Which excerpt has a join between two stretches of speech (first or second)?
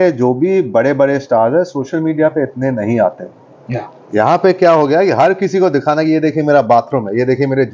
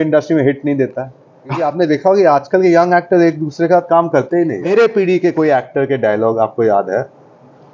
second